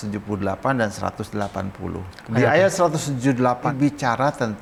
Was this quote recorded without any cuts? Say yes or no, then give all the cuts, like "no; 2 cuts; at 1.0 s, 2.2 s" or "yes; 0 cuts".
yes; 0 cuts